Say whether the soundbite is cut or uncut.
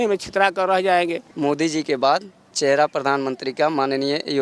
cut